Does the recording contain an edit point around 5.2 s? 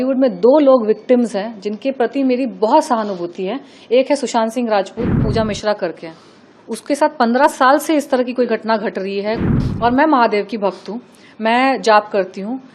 yes; 2 cuts; at 5.2 s, 9.5 s

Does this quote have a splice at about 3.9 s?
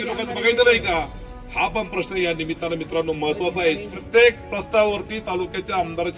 yes; 1 cut; at 3.9 s

